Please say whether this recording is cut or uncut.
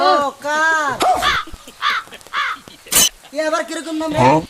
uncut